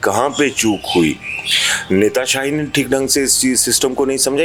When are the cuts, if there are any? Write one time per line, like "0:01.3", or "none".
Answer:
none